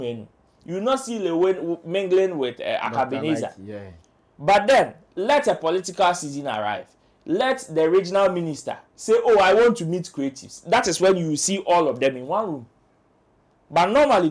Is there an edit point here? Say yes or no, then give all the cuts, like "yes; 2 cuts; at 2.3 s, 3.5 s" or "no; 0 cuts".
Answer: no; 0 cuts